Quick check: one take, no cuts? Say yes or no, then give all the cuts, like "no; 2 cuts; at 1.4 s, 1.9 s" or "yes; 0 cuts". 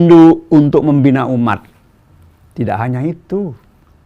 yes; 0 cuts